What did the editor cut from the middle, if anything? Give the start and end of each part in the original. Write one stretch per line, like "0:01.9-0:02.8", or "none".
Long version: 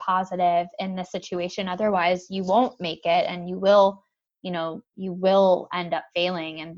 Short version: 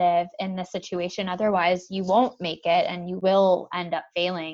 0:03.5-0:05.1